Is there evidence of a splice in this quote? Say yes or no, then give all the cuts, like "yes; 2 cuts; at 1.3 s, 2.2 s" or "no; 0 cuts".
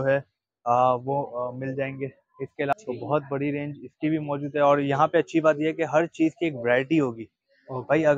yes; 1 cut; at 2.7 s